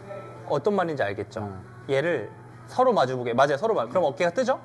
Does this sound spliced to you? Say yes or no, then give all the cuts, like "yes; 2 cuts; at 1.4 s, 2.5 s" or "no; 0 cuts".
no; 0 cuts